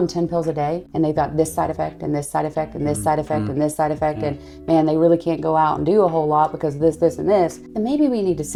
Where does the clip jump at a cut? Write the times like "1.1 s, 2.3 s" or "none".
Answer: none